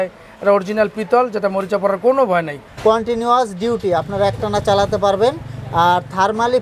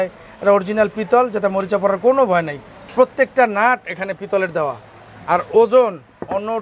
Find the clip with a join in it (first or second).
first